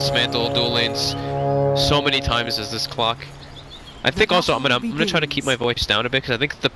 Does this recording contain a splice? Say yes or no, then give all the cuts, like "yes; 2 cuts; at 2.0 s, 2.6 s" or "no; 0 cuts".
yes; 1 cut; at 5.3 s